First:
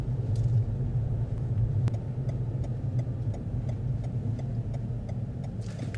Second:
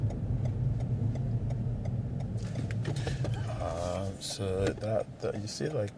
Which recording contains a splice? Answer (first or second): first